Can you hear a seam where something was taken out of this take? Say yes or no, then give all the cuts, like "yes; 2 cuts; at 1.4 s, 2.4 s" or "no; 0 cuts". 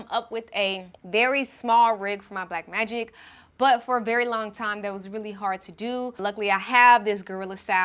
yes; 2 cuts; at 0.9 s, 6.2 s